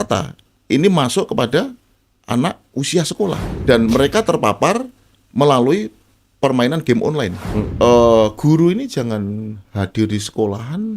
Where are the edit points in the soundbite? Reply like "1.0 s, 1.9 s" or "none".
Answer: 3.5 s, 7.7 s